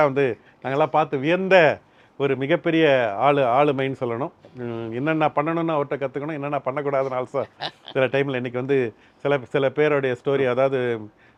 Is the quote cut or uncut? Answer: uncut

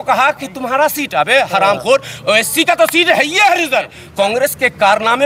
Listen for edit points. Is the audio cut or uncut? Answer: cut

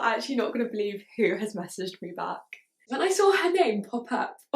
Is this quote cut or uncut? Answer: cut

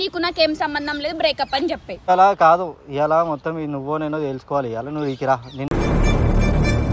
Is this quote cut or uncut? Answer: cut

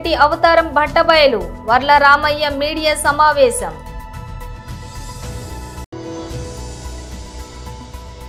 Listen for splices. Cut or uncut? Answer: uncut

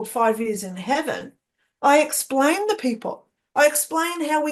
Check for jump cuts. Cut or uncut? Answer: uncut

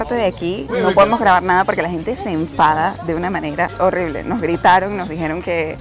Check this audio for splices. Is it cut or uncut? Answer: uncut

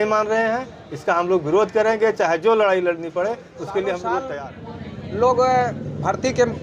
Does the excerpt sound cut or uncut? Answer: cut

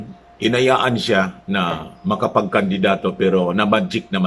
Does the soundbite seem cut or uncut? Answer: uncut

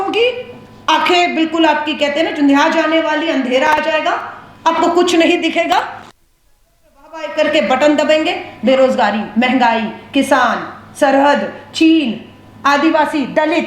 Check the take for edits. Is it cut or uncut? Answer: uncut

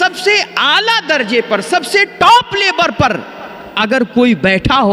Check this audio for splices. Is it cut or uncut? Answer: uncut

